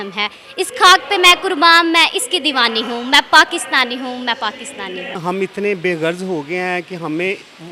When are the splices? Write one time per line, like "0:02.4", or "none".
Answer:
0:05.1

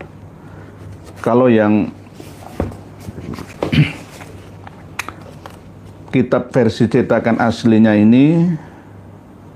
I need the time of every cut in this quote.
none

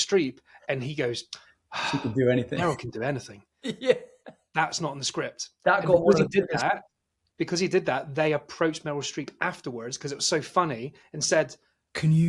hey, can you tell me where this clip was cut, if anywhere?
none

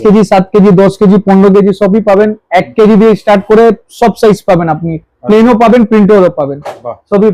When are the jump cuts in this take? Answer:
none

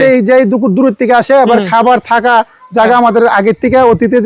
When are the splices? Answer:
none

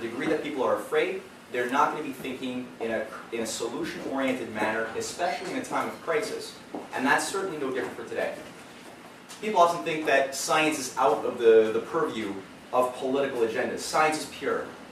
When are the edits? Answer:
0:06.0

